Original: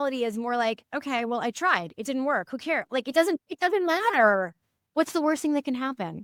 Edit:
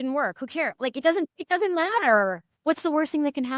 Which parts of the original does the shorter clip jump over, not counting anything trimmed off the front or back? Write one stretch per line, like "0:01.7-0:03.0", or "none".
0:04.6-0:04.8